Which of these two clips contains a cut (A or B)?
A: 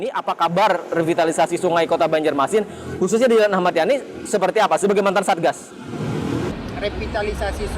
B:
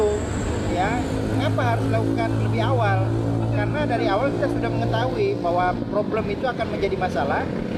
A